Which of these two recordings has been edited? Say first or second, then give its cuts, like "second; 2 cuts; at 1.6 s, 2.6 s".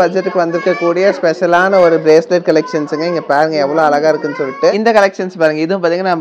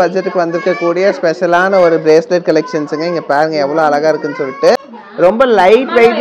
first; 1 cut; at 4.7 s